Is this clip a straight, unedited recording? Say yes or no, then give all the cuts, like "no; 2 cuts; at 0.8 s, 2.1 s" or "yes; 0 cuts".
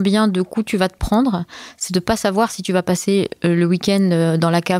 yes; 0 cuts